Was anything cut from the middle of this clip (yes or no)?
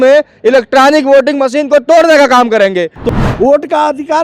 yes